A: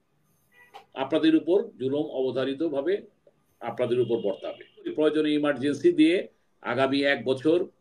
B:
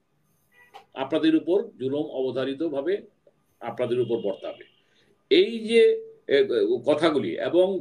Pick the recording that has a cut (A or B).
A